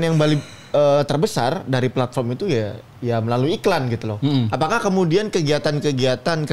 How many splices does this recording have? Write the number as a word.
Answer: zero